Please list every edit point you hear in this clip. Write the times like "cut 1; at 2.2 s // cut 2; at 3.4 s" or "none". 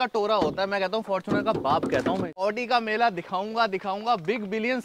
cut 1; at 2.5 s